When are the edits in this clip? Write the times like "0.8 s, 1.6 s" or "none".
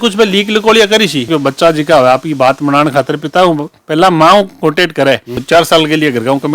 1.3 s, 5.4 s